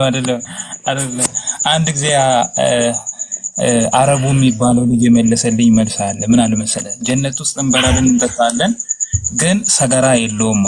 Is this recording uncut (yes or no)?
yes